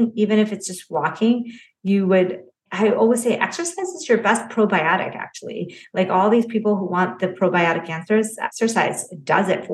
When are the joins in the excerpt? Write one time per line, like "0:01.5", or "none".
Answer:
0:08.4